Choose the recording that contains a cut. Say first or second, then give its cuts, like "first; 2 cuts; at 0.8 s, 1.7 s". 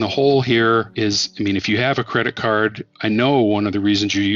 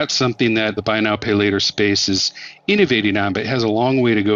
first; 2 cuts; at 0.9 s, 2.9 s